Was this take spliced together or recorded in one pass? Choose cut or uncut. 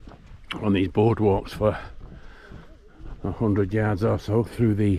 uncut